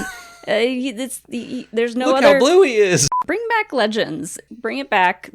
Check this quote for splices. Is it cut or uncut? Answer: cut